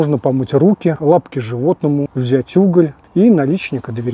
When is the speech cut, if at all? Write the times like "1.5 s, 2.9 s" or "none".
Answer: 1.0 s, 2.1 s, 3.0 s